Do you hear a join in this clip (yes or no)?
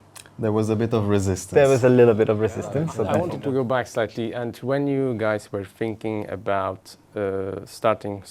yes